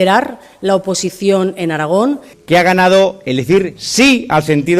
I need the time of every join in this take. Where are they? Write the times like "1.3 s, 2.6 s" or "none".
2.3 s